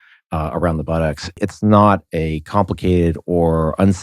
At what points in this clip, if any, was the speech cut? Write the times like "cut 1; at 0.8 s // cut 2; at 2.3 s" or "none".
cut 1; at 1.4 s